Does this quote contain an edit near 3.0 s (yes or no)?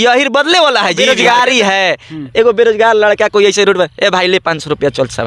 no